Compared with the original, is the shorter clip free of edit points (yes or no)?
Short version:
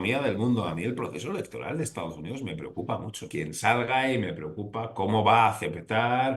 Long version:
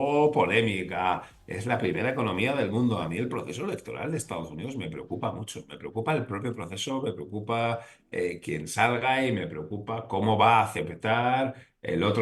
no